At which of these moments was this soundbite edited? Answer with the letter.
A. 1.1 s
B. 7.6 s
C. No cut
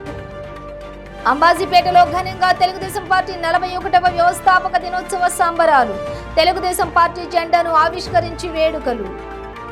C